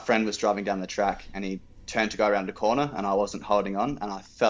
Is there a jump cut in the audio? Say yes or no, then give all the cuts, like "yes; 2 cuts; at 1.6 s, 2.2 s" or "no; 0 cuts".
no; 0 cuts